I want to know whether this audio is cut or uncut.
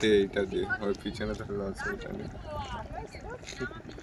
uncut